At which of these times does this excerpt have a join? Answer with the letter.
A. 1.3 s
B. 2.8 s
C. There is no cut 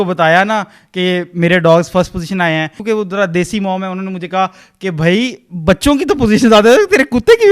B